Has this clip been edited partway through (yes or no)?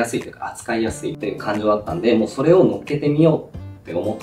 yes